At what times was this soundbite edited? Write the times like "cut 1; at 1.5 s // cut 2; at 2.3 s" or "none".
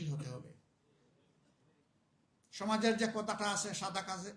none